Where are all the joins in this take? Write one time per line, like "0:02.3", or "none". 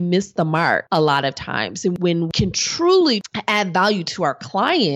0:00.8
0:02.0
0:03.3

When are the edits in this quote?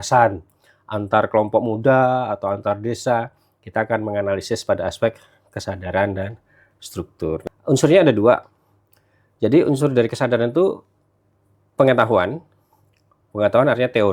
0:07.4

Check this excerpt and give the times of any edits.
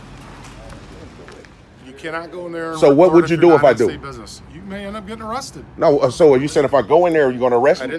0:01.2

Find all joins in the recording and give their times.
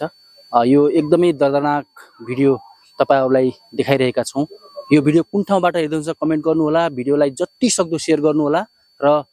none

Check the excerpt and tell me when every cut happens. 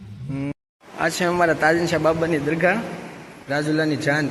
0:01.1

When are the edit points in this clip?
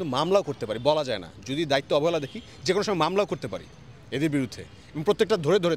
none

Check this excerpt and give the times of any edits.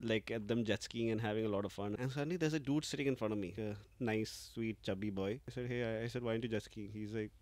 0:01.9
0:03.7
0:05.5

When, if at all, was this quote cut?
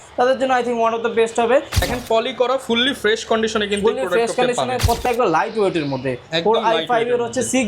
0:01.8
0:05.0

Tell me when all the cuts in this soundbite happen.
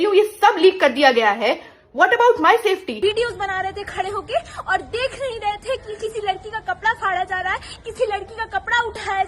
0:02.9

